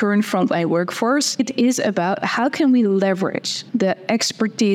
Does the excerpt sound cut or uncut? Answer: cut